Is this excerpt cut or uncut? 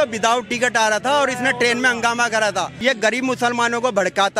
cut